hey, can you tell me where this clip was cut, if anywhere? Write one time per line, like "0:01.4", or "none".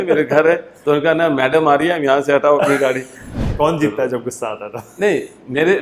0:03.3